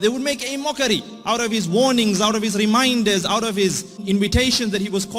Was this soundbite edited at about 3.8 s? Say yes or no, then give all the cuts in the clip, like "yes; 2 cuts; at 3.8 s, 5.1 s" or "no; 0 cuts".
no; 0 cuts